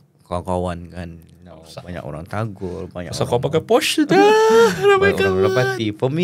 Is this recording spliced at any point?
no; 0 cuts

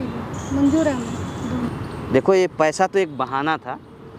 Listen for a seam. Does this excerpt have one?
yes; 1 cut; at 1.7 s

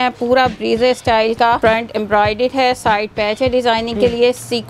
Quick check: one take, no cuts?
no; 1 cut; at 1.6 s

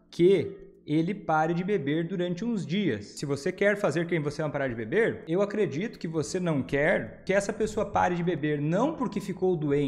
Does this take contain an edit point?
yes; 3 cuts; at 3.1 s, 5.2 s, 7.1 s

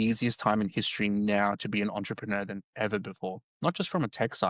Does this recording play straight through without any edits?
yes; 0 cuts

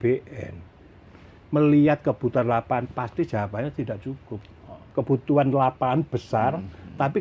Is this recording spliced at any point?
yes; 1 cut; at 4.9 s

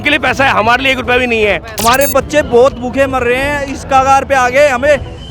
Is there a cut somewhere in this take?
yes; 1 cut; at 1.7 s

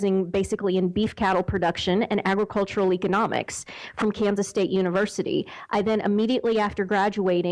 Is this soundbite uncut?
no; 1 cut; at 2.4 s

